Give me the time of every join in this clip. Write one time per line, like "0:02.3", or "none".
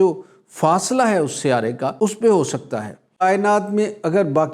0:01.9
0:03.2